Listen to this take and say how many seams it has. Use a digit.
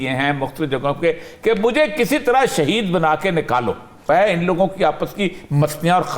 1